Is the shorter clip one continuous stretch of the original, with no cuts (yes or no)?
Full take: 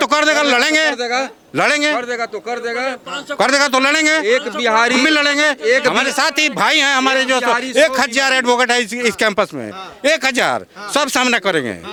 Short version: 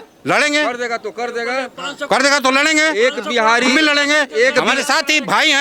yes